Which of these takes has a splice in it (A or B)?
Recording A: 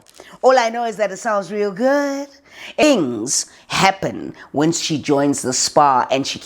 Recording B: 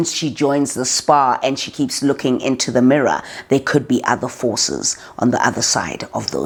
A